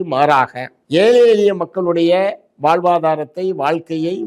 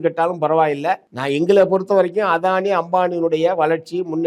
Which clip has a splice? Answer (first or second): second